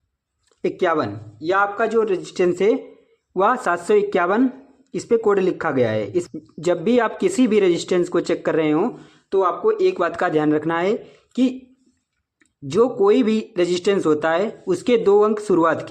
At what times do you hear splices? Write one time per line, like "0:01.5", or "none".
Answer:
0:06.3